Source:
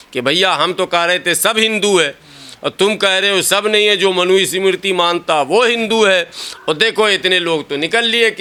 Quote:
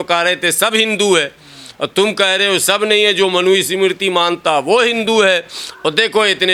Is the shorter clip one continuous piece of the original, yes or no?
yes